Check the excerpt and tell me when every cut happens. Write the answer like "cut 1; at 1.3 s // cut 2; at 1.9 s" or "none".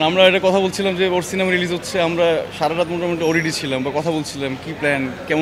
none